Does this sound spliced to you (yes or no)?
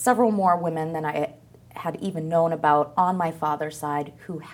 no